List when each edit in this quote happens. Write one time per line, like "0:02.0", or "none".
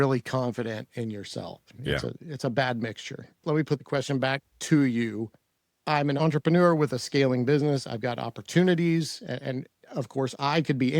0:03.4
0:06.2